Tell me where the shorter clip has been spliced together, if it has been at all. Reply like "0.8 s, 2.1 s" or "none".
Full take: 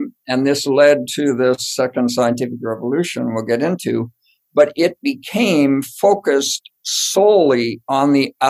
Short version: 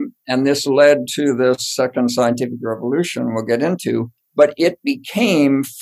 4.2 s